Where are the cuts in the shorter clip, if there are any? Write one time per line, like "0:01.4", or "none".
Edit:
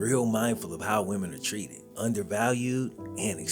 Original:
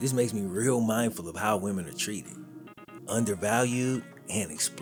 0:01.8